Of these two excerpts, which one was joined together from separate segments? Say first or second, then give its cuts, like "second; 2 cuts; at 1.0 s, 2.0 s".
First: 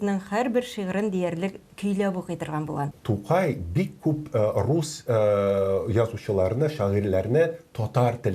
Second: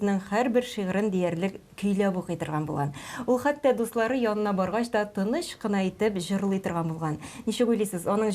first; 1 cut; at 3.0 s